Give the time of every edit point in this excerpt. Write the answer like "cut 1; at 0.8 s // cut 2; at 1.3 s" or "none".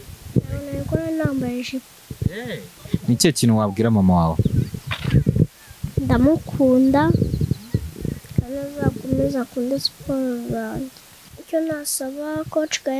cut 1; at 2.7 s // cut 2; at 11.4 s